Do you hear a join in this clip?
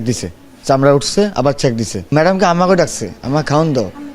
yes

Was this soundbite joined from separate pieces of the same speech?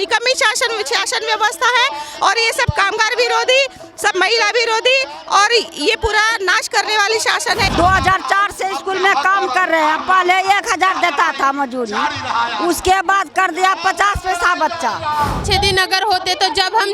yes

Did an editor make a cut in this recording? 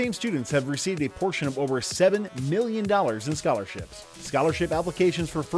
no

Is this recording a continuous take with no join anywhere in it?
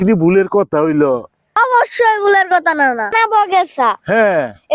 no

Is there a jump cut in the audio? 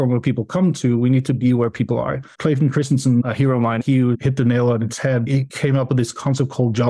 yes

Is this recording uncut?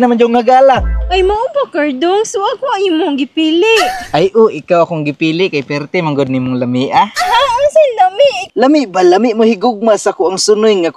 no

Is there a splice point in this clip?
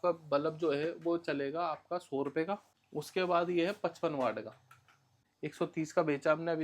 yes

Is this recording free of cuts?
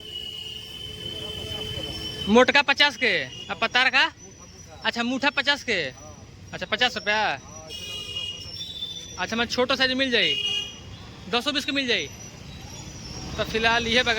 yes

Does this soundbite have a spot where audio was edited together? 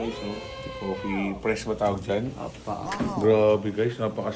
yes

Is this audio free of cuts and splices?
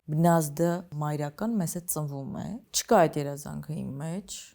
no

